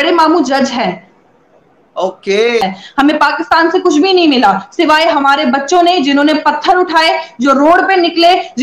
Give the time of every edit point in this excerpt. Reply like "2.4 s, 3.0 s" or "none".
2.6 s